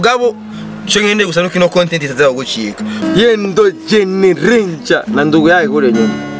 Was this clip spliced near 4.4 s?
no; 1 cut; at 3.0 s

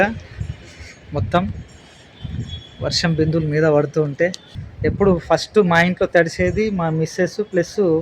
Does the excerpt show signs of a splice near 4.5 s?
yes; 1 cut; at 4.5 s

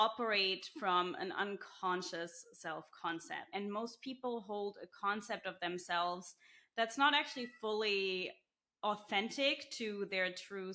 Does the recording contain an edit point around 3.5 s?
yes; 1 cut; at 3.5 s

